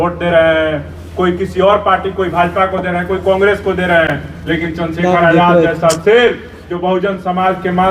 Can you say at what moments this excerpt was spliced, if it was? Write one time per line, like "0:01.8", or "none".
none